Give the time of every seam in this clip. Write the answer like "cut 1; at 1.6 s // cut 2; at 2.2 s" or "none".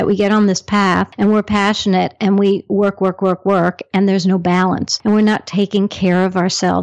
cut 1; at 1.1 s // cut 2; at 4.9 s